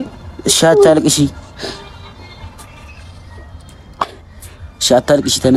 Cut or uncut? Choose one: uncut